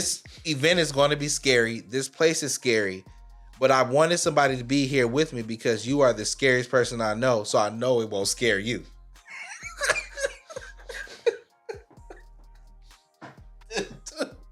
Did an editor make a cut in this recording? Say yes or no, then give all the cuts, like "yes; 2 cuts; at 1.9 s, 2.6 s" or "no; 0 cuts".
no; 0 cuts